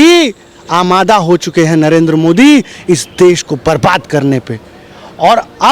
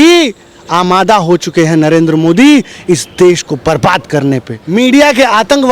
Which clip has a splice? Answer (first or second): second